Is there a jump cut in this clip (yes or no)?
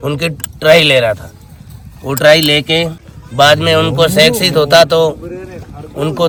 no